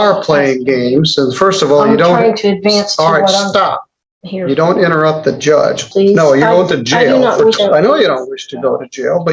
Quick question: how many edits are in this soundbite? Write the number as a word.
two